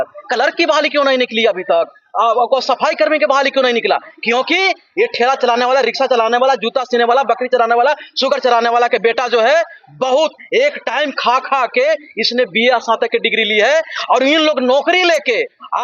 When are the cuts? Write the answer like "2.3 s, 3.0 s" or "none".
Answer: none